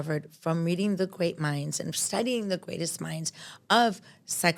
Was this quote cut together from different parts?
no; 0 cuts

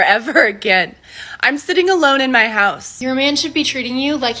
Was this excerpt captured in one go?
no; 1 cut; at 2.9 s

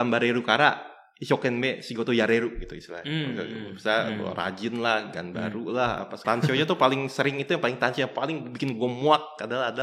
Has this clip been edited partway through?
yes; 1 cut; at 6.2 s

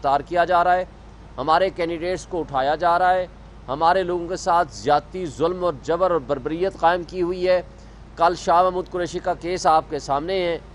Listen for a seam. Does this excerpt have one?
no; 0 cuts

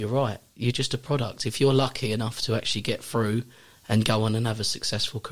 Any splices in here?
no; 0 cuts

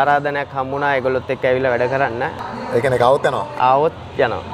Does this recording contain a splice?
yes; 1 cut; at 2.4 s

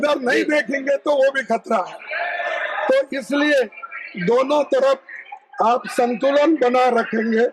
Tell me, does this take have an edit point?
no; 0 cuts

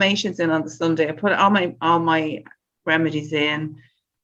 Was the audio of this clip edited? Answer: no; 0 cuts

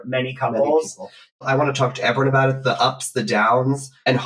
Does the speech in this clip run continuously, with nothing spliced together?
no; 1 cut; at 1.5 s

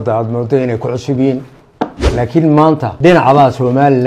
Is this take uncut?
no; 2 cuts; at 2.0 s, 2.9 s

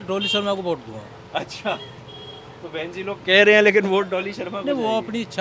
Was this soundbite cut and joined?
no; 0 cuts

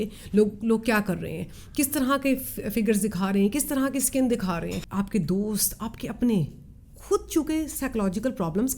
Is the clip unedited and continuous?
no; 1 cut; at 4.8 s

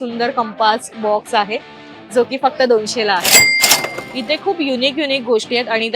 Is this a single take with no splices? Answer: no; 1 cut; at 3.7 s

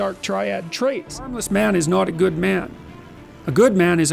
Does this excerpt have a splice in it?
yes; 1 cut; at 1.4 s

